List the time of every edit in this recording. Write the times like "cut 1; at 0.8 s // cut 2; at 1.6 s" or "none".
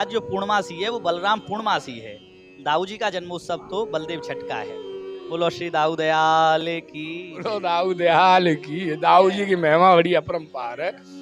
cut 1; at 7.5 s